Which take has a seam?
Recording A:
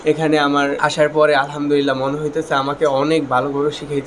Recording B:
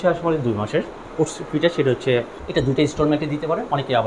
B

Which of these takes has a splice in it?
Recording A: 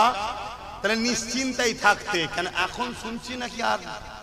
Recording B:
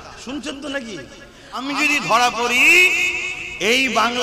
B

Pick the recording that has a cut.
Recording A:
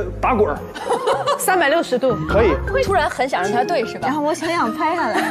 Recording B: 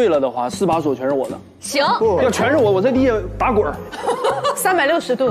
B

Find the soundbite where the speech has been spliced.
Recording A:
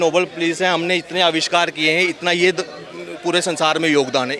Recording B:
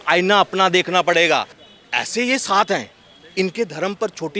B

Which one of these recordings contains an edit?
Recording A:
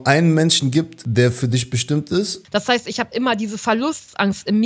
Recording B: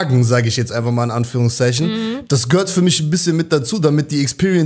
A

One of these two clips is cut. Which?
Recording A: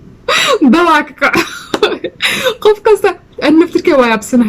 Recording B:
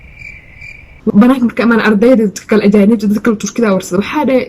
B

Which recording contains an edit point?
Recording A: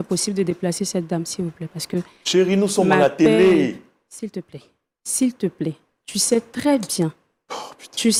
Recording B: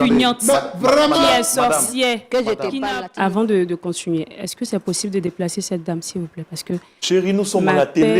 B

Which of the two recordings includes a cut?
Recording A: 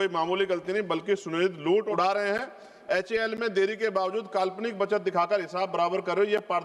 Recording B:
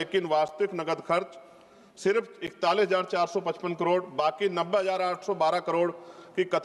A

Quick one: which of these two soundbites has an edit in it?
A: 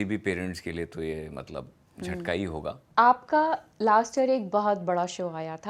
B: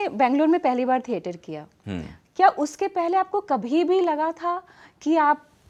A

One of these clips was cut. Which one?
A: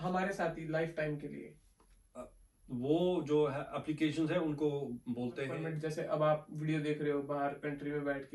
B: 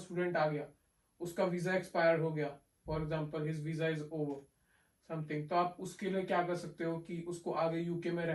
A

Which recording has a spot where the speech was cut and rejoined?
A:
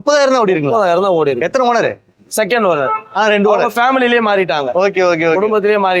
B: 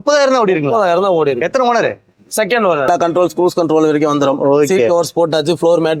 B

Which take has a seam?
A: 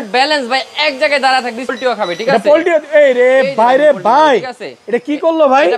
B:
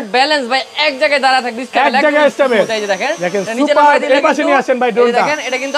A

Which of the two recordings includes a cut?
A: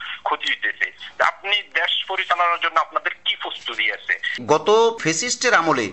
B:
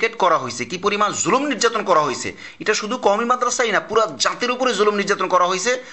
A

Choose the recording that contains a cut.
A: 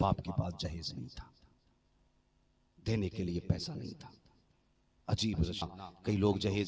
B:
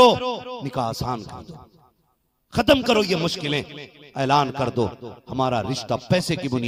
A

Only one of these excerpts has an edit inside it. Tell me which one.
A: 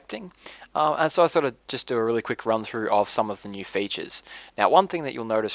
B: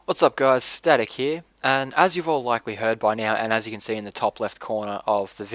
A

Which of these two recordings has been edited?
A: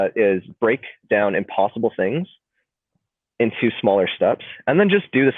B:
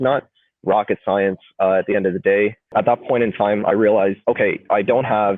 B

